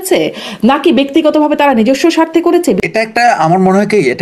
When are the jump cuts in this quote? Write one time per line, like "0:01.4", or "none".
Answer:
0:02.8